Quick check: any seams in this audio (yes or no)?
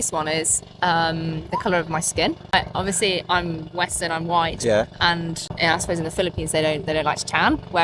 yes